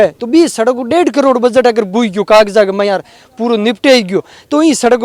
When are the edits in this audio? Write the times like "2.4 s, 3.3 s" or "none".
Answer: none